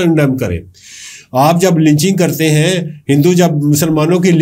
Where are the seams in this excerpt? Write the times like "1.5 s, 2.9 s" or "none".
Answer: none